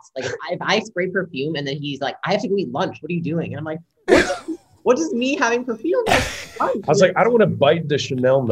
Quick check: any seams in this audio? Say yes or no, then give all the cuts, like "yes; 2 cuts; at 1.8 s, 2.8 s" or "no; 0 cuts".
no; 0 cuts